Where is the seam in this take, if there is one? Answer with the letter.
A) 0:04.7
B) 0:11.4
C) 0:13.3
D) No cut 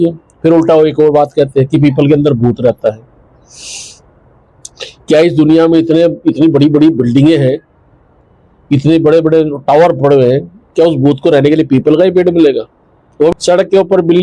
C